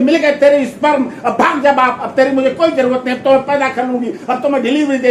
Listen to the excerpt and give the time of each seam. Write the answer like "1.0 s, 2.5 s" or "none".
none